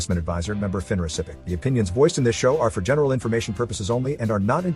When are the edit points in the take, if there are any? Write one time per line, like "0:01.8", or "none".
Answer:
0:01.4